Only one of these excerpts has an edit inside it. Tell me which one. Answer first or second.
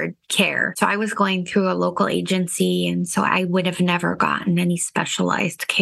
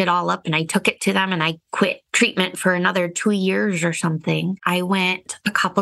second